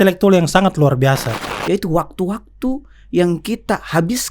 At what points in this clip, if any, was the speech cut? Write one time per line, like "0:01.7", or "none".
0:01.3